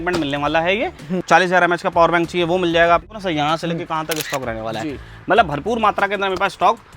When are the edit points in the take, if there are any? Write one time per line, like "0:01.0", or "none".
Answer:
0:01.2
0:03.0